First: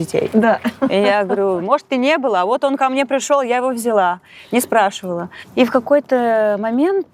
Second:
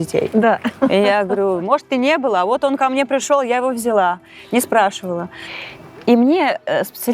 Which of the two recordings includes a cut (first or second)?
second